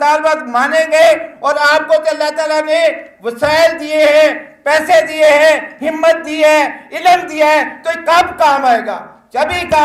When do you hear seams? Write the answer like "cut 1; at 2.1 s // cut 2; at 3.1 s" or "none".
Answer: none